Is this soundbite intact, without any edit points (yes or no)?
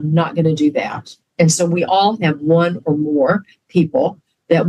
yes